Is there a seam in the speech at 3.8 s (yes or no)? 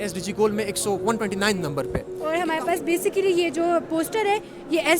no